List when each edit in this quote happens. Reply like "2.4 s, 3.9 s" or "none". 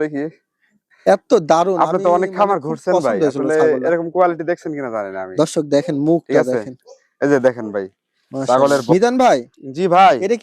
8.8 s